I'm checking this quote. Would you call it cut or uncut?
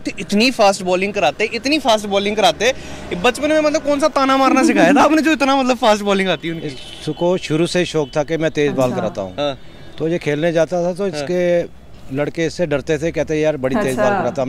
uncut